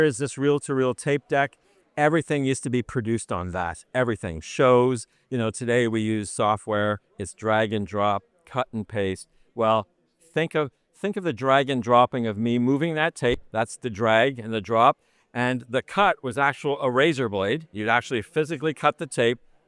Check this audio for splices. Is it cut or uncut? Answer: cut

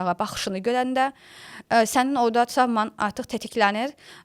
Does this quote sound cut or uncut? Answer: uncut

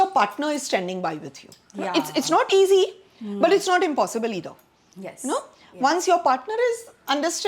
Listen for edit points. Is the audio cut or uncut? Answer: uncut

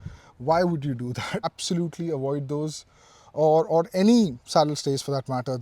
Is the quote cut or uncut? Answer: cut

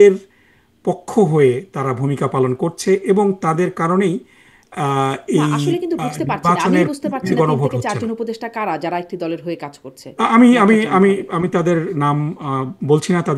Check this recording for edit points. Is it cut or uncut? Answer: uncut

